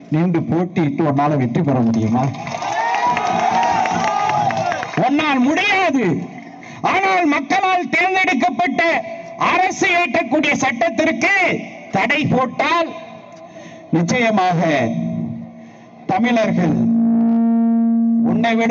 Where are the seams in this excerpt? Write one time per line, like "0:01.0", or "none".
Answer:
none